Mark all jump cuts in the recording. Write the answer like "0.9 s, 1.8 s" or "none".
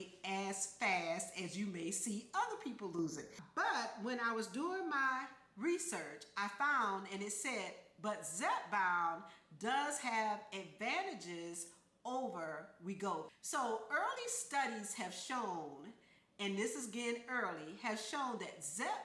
3.4 s

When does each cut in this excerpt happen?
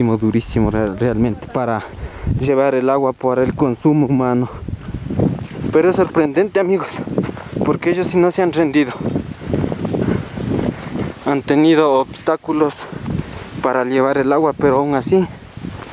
none

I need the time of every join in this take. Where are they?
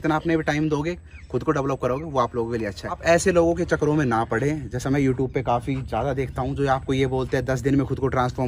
3.0 s

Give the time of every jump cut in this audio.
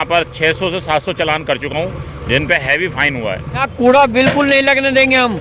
3.7 s

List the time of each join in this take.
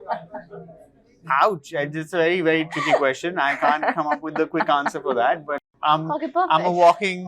5.7 s

